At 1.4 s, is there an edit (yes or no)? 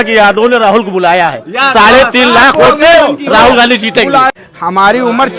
no